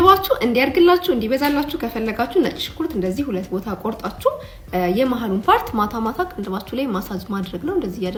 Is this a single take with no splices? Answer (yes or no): yes